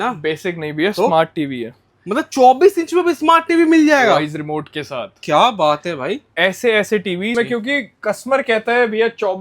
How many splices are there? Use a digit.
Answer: 1